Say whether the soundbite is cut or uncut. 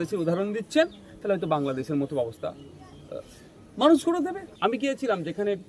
cut